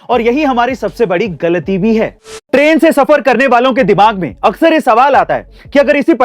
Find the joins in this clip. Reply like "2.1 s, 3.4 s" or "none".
2.4 s

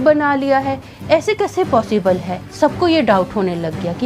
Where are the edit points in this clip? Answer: 2.4 s

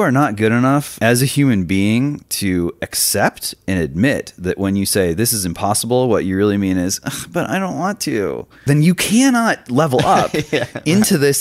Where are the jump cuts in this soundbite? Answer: 0.9 s, 8.6 s

